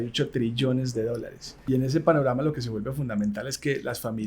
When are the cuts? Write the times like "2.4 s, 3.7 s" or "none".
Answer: 1.5 s